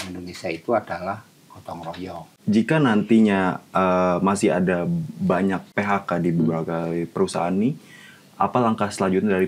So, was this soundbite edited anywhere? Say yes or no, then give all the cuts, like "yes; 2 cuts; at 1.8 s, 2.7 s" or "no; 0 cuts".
yes; 2 cuts; at 2.3 s, 5.7 s